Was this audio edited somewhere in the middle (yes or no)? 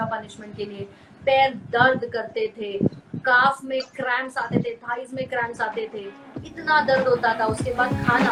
no